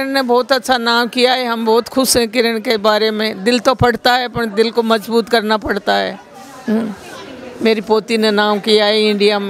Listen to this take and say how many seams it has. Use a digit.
0